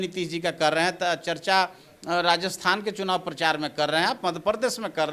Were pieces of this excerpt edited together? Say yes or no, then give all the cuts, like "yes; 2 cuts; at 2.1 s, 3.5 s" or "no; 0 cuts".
no; 0 cuts